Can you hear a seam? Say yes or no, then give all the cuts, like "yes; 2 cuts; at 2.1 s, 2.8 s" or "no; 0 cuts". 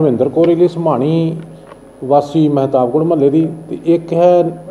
no; 0 cuts